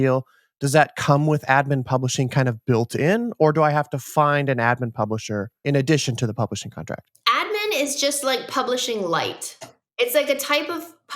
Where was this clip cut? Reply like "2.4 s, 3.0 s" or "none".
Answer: 5.5 s, 7.1 s, 9.9 s